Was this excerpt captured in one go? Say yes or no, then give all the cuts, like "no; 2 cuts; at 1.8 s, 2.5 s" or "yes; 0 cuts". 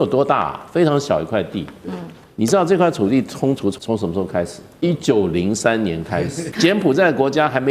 no; 3 cuts; at 3.8 s, 4.6 s, 6.4 s